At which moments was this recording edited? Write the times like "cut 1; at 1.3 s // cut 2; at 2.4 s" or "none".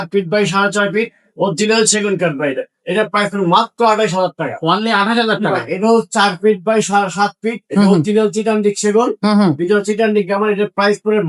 none